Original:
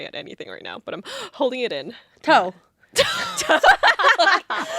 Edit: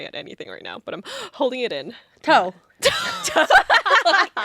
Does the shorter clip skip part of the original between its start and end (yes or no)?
yes